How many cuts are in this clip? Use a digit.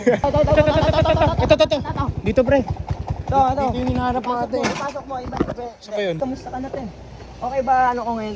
0